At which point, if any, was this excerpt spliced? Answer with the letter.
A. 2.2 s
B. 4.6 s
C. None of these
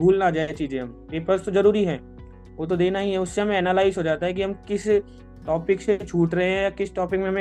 C